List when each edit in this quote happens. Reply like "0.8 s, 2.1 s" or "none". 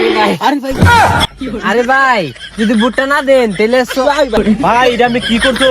4.4 s